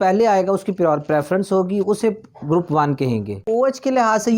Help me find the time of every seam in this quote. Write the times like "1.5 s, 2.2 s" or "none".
3.4 s

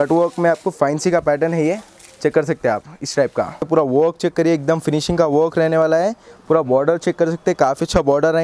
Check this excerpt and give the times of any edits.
3.7 s

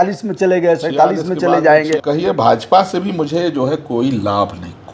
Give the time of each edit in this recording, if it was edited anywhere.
2.0 s

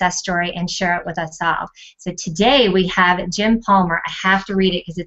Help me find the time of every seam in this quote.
none

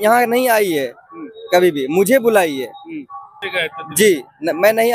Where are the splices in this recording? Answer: 3.4 s

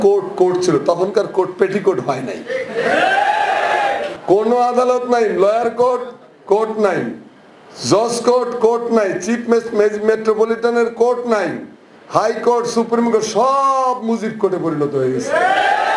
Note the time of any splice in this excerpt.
4.1 s

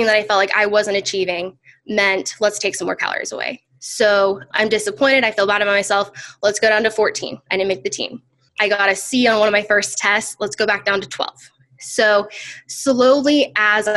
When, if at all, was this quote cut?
4.5 s, 8.5 s

